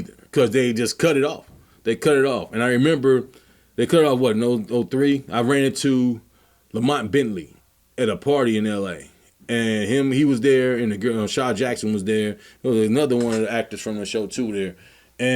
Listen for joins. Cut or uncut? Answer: uncut